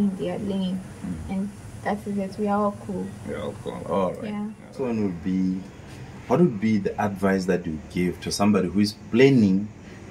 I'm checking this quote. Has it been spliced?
no; 0 cuts

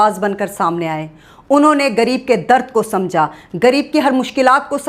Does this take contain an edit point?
no; 0 cuts

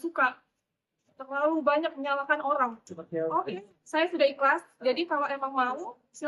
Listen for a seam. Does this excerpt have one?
yes; 1 cut; at 2.8 s

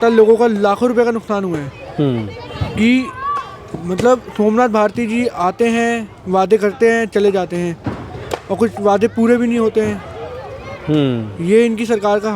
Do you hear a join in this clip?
no; 0 cuts

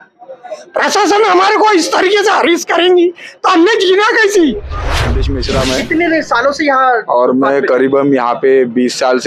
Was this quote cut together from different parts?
yes; 1 cut; at 5.1 s

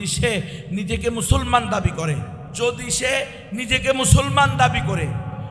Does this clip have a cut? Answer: yes; 1 cut; at 2.4 s

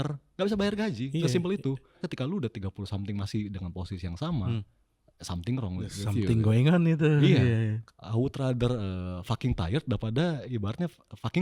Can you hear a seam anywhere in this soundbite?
yes; 2 cuts; at 1.9 s, 7.8 s

